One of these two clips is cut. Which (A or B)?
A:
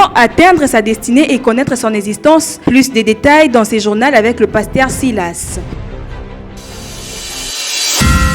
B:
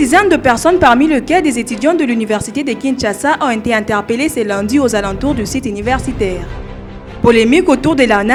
A